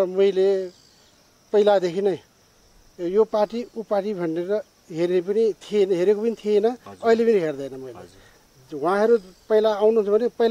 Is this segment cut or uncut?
uncut